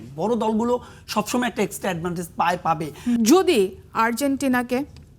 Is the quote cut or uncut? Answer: cut